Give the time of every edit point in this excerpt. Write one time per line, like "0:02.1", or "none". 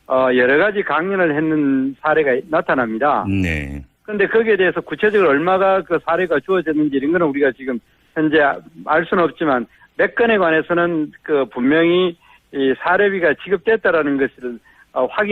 0:04.6